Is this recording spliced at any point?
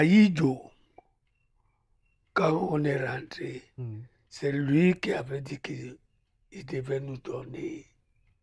no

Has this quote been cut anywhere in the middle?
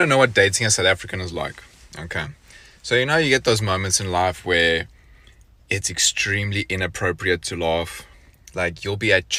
no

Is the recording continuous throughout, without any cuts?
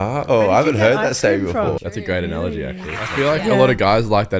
no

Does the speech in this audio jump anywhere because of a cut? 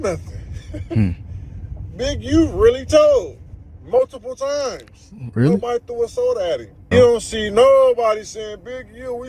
yes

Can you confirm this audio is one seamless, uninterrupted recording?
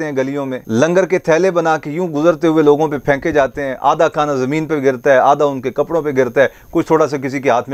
yes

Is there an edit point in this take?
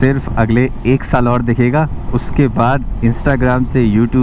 no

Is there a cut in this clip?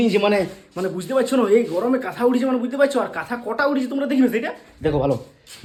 no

